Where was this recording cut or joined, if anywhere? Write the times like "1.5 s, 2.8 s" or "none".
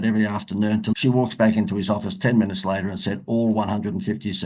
0.9 s